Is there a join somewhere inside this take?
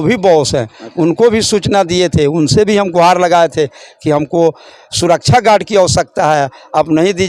no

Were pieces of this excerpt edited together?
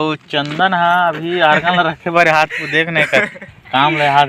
no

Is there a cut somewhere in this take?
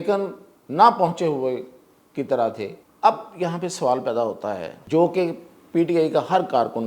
yes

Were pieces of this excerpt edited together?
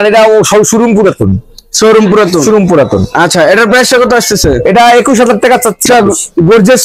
yes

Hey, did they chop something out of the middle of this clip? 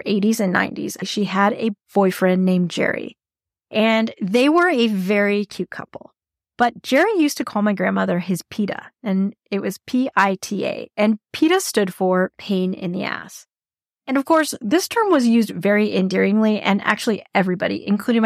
yes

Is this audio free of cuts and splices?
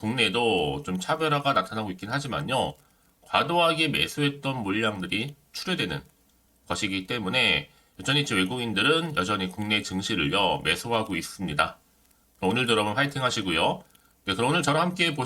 yes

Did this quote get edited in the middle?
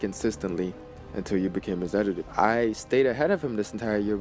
yes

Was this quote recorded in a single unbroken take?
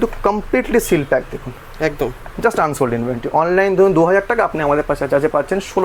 yes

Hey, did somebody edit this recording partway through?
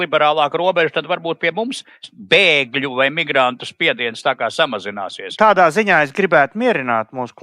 yes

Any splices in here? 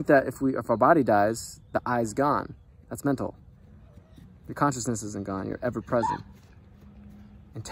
no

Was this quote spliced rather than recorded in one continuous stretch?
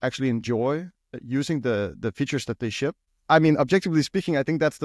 yes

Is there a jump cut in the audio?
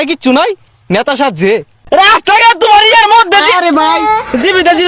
yes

